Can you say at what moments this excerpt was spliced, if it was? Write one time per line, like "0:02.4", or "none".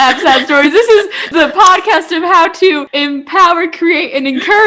0:01.3
0:02.9